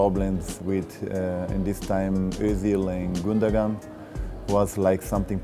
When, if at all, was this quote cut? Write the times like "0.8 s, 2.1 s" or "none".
none